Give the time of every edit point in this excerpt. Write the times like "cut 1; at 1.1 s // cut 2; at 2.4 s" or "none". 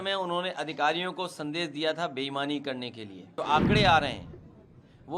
cut 1; at 3.4 s